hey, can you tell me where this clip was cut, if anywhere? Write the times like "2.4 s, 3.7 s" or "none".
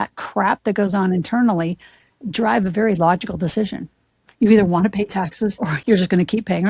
5.8 s